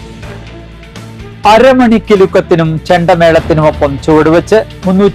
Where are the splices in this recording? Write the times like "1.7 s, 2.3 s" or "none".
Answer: 1.1 s